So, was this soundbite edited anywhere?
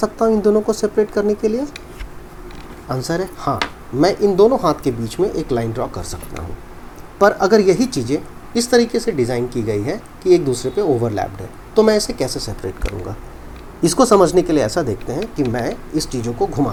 no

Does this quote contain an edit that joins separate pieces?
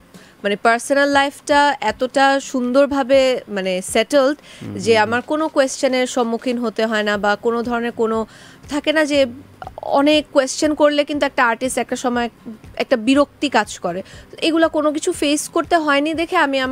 no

